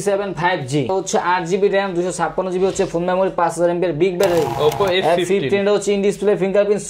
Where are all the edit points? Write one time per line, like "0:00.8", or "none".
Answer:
0:00.9
0:04.5